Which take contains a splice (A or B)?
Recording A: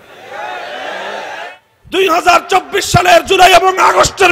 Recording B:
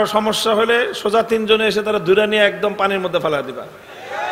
A